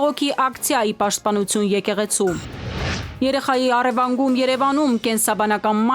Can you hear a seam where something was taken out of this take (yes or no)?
yes